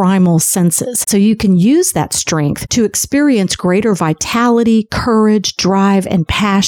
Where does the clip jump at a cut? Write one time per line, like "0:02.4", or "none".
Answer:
0:01.0